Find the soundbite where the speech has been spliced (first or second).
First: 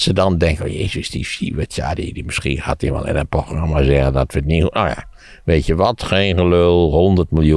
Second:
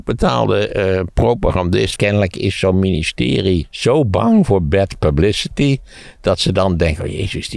second